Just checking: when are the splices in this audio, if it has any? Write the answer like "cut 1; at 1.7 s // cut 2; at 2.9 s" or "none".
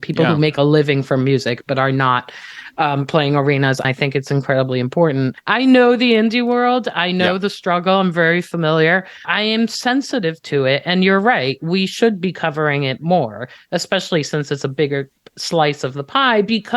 cut 1; at 3.8 s // cut 2; at 5.4 s // cut 3; at 9.2 s